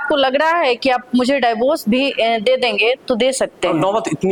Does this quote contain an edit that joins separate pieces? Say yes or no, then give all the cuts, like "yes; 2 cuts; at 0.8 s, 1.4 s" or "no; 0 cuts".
no; 0 cuts